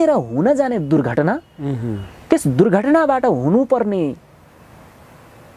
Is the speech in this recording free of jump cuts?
yes; 0 cuts

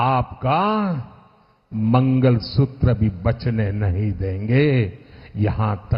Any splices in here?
no; 0 cuts

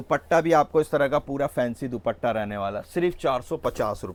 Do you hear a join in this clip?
no; 0 cuts

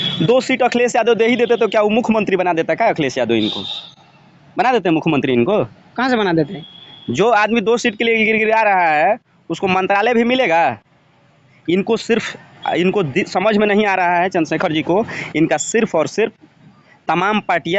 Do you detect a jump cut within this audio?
no; 0 cuts

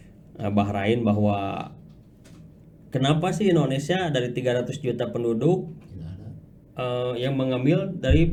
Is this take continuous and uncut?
yes; 0 cuts

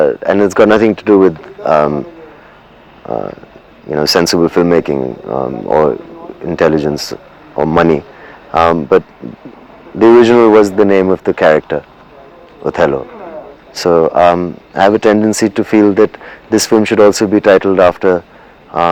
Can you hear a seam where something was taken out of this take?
no; 0 cuts

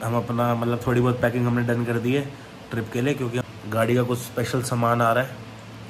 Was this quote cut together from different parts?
yes; 1 cut; at 3.4 s

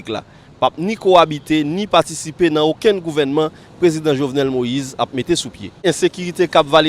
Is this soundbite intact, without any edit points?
no; 1 cut; at 5.8 s

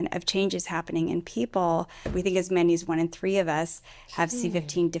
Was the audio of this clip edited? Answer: yes; 1 cut; at 2.0 s

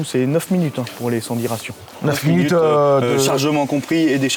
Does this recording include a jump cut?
no; 0 cuts

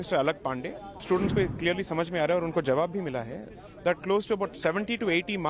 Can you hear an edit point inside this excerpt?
yes; 1 cut; at 1.0 s

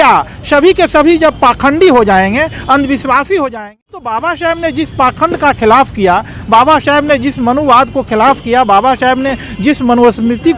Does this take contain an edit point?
yes; 1 cut; at 3.5 s

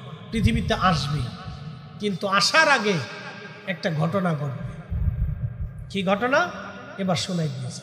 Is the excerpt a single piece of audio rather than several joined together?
yes; 0 cuts

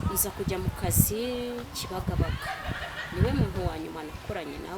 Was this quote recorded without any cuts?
yes; 0 cuts

